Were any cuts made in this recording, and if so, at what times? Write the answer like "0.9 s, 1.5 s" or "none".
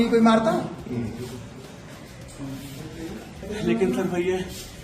3.4 s